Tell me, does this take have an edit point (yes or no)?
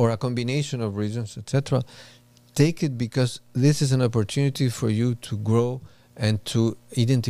no